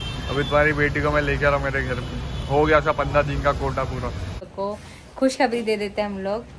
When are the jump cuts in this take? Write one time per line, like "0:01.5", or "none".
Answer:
0:04.5